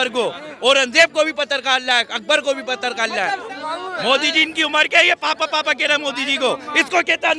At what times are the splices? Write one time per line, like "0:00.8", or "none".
0:03.5